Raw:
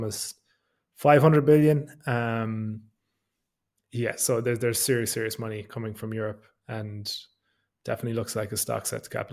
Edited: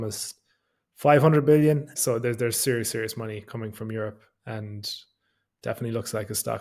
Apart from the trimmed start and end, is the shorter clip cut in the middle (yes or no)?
yes